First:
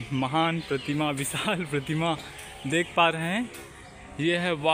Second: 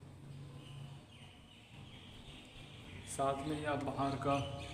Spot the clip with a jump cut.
second; 1 cut; at 2.9 s

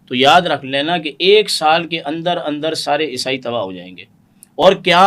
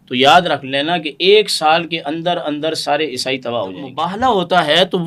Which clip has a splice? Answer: second; 1 cut; at 4.0 s

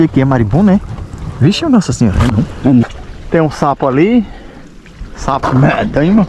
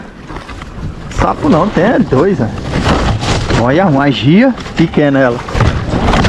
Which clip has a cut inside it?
first; 1 cut; at 2.8 s

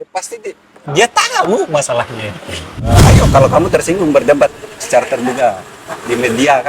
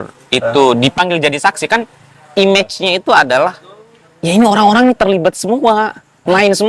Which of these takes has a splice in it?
first; 1 cut; at 2.9 s

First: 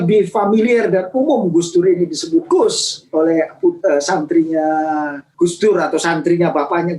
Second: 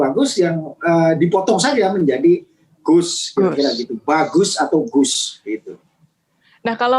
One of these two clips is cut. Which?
first; 1 cut; at 5.2 s

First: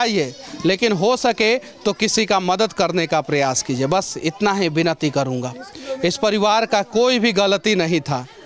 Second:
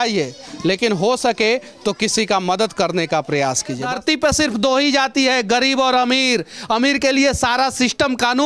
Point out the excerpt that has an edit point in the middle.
second; 1 cut; at 3.8 s

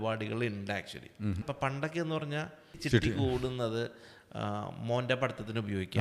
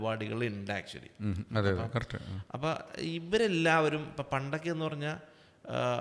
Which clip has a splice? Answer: first; 2 cuts; at 1.4 s, 2.8 s

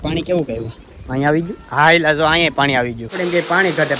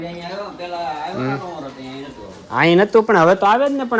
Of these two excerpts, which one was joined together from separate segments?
first; 1 cut; at 3.0 s

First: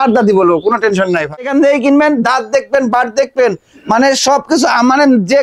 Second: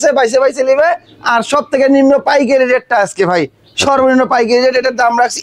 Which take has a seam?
first; 1 cut; at 1.4 s

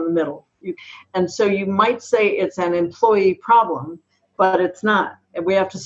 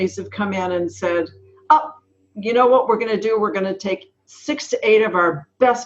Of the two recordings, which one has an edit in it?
first; 1 cut; at 0.9 s

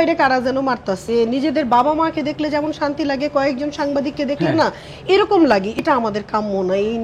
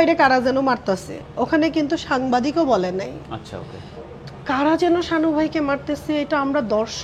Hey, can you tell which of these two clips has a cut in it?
first; 2 cuts; at 1.1 s, 5.7 s

